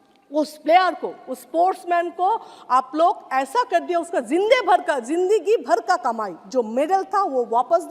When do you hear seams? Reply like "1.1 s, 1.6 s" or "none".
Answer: none